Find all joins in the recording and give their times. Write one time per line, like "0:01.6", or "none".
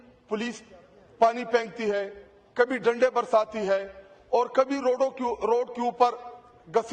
none